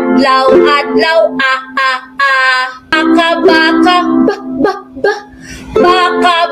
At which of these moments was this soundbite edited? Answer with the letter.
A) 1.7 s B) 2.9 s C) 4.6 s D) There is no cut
B